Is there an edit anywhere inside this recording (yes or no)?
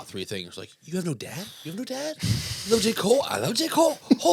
no